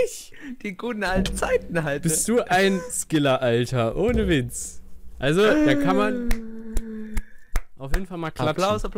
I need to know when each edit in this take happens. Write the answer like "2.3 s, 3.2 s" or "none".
none